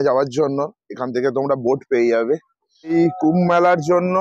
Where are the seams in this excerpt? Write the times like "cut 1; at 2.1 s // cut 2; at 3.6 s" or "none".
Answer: cut 1; at 2.9 s